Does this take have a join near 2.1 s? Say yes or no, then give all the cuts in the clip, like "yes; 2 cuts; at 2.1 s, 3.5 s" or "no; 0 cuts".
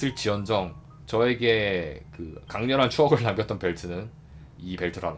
no; 0 cuts